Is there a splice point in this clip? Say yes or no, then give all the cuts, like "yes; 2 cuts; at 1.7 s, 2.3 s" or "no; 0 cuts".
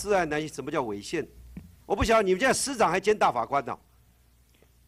no; 0 cuts